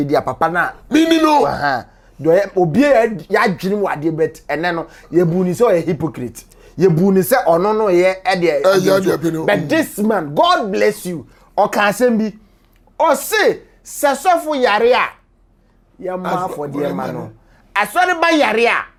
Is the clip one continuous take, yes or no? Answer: yes